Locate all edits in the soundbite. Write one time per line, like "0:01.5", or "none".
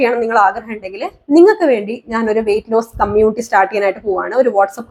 none

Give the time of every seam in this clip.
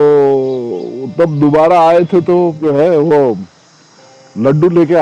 0:02.6

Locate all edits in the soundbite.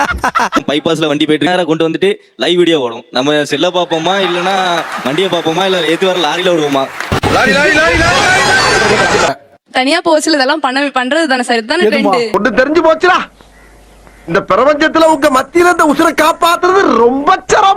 0:01.5
0:09.3

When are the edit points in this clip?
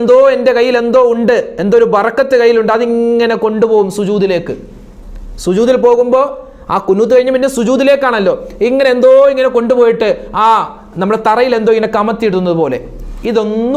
none

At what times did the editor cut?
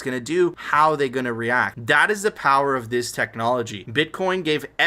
none

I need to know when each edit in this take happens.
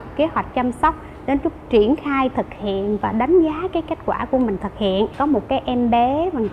0:05.1

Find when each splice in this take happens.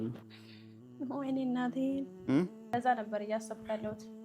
0:02.7

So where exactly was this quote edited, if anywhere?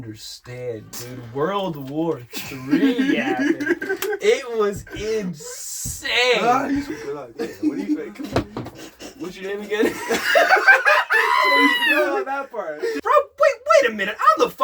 0:06.9
0:13.0

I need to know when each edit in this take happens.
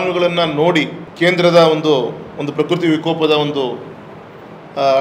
0:01.0

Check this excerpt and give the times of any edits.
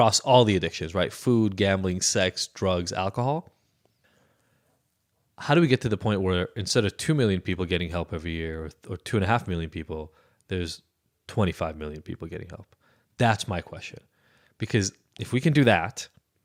none

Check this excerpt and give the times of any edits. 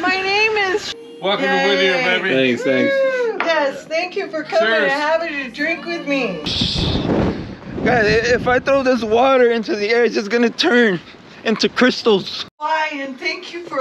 0:00.9
0:06.5
0:12.5

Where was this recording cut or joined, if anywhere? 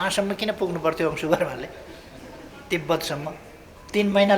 none

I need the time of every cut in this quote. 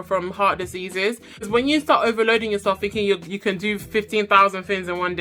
0:01.4

